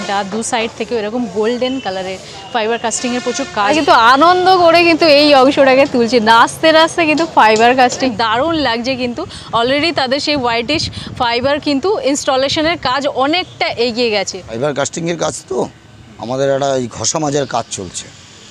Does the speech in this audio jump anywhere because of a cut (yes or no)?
yes